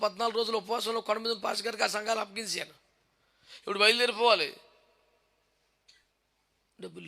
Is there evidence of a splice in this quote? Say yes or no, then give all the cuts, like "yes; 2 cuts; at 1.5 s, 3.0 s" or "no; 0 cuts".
no; 0 cuts